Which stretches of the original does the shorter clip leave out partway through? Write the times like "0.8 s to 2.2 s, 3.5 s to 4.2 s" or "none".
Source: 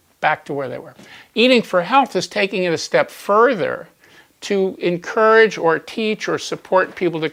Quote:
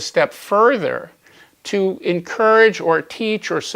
none